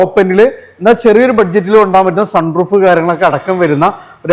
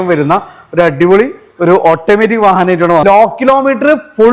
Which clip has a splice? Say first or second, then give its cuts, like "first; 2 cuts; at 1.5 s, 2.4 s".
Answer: second; 1 cut; at 3.0 s